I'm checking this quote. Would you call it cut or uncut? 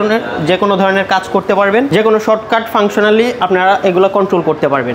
uncut